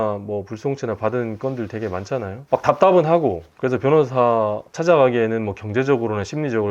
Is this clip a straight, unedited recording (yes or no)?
no